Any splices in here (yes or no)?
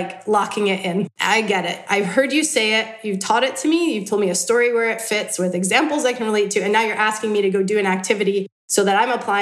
no